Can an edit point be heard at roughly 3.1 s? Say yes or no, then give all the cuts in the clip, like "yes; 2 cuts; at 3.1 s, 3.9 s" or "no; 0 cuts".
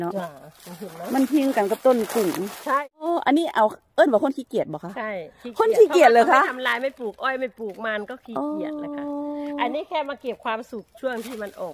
yes; 1 cut; at 3.1 s